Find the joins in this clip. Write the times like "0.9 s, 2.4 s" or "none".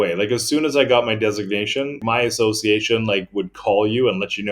2.0 s